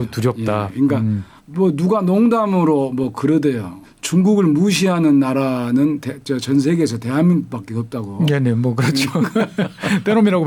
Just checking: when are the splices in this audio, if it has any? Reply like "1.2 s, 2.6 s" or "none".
none

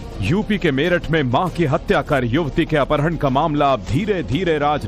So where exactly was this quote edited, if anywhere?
2.8 s

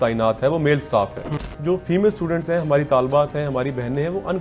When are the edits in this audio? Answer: 1.5 s

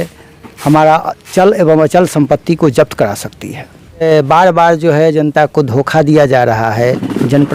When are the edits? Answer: 4.0 s

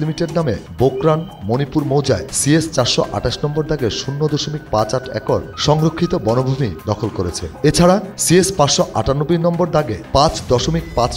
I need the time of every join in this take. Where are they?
none

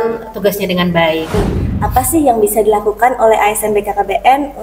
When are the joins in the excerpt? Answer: 1.3 s

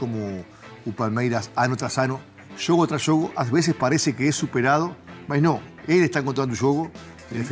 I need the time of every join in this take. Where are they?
none

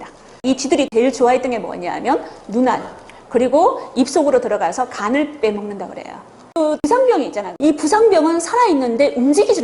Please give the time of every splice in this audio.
none

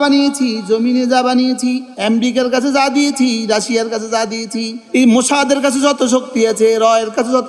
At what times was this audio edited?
none

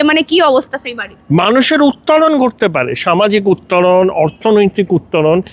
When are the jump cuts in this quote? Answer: none

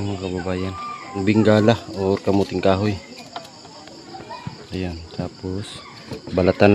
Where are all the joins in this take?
1.2 s

